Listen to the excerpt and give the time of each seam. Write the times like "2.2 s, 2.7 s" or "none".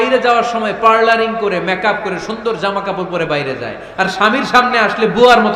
none